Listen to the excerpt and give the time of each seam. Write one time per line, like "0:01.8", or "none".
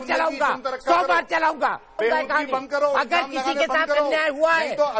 0:02.0